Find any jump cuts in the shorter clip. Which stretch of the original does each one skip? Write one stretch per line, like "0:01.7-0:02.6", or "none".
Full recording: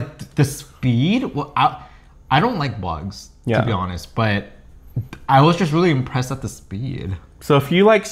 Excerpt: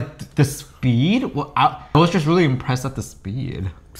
0:01.9-0:05.4